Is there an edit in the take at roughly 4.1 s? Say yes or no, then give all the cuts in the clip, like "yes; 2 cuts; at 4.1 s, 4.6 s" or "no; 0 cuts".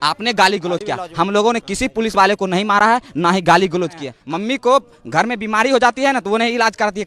yes; 1 cut; at 4.1 s